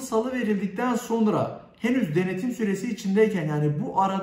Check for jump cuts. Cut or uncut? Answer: uncut